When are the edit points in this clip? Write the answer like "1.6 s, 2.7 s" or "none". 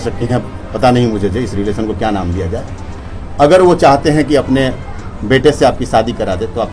none

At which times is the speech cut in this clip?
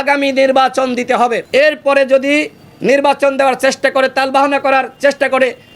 1.4 s

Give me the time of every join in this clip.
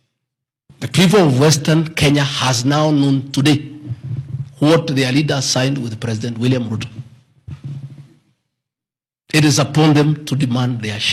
none

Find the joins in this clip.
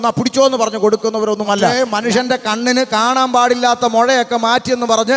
1.7 s

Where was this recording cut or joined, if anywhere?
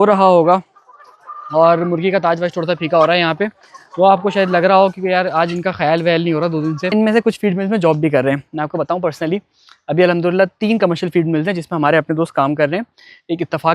6.8 s

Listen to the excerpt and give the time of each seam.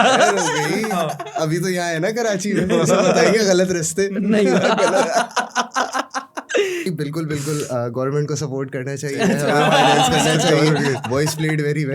6.9 s

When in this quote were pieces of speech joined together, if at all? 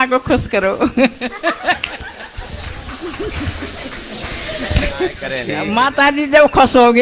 5.4 s

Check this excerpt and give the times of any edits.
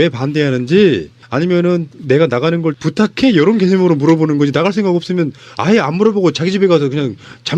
2.6 s

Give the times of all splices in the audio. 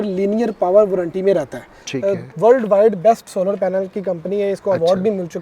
1.8 s

